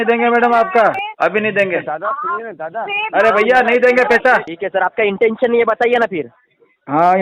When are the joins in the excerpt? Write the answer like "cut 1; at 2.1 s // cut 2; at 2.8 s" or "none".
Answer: cut 1; at 1.0 s // cut 2; at 4.5 s